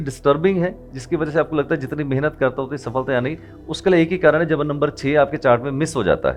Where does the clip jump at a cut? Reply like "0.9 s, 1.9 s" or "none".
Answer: none